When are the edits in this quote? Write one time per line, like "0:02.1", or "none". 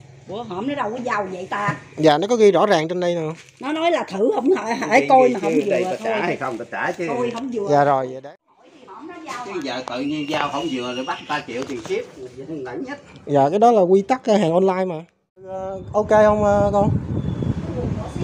0:08.1
0:15.5